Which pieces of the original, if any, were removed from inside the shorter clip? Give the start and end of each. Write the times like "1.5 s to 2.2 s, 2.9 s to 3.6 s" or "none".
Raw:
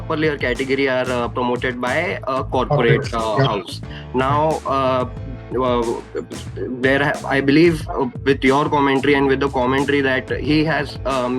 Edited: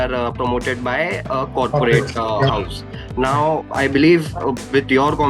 4.6 s to 7.2 s

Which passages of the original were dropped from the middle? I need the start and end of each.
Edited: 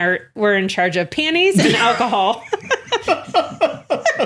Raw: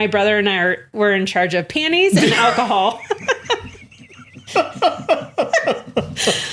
3.6 s to 4.5 s

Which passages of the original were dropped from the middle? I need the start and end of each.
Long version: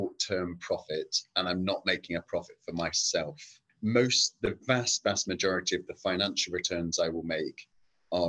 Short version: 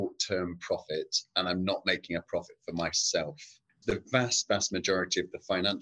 3.7 s to 4.2 s

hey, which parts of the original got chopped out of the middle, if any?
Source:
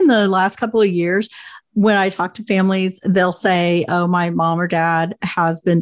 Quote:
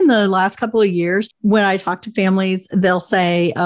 1.3 s to 1.6 s

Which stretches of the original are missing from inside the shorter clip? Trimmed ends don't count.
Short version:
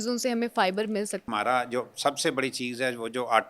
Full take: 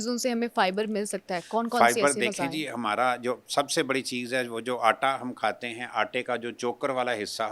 1.2 s to 2.7 s

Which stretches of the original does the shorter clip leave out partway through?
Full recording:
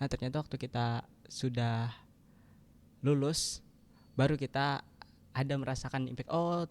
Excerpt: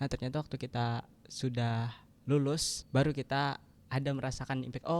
2.0 s to 2.8 s, 3.5 s to 4.0 s, 5.0 s to 5.2 s

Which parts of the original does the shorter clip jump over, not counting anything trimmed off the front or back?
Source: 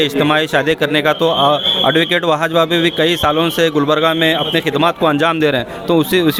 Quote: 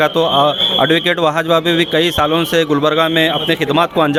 none

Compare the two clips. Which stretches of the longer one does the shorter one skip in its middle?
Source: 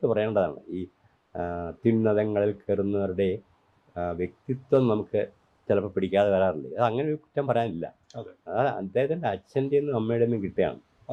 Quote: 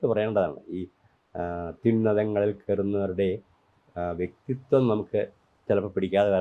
none

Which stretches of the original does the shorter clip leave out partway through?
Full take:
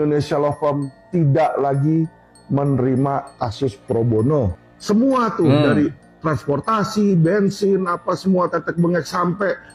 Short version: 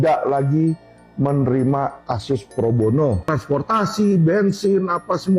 4.6 s to 6.3 s

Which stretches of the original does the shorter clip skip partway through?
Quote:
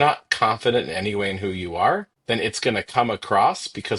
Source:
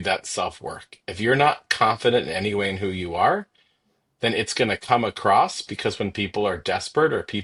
3.5 s to 4.1 s

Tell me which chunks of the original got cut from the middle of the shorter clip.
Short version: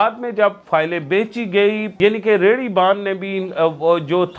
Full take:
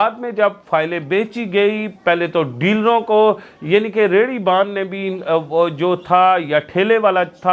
1.9 s to 3.6 s

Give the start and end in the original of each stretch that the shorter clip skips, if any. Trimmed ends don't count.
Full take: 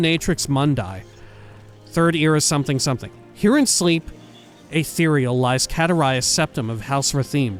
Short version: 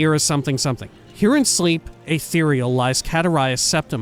4.1 s to 4.6 s

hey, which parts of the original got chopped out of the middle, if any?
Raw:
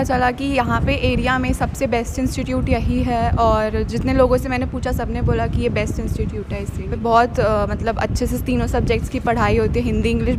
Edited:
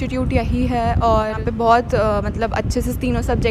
3.7 s to 6.8 s

